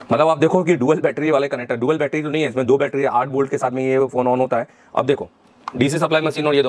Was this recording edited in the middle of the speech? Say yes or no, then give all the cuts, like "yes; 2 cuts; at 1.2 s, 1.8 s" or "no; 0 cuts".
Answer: no; 0 cuts